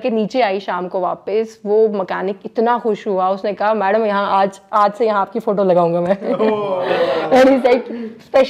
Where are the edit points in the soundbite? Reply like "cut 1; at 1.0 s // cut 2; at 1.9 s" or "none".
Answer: none